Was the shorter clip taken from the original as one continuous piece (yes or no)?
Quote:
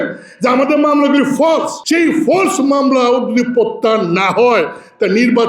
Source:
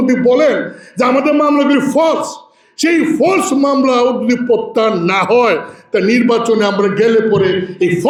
no